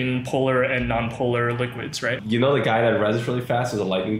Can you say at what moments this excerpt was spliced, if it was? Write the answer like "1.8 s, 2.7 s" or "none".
2.2 s